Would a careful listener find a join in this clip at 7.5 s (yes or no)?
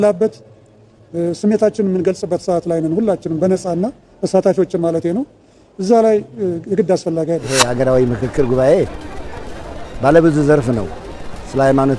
yes